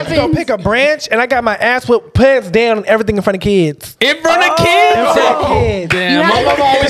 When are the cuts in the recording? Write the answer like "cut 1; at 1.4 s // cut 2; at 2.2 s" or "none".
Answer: cut 1; at 3.9 s